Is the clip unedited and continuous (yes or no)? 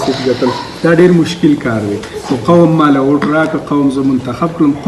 yes